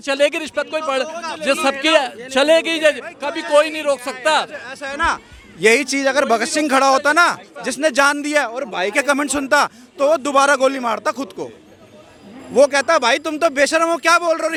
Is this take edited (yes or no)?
no